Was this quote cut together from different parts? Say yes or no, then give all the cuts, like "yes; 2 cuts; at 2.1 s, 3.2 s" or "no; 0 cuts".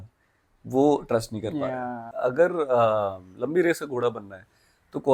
yes; 1 cut; at 2.0 s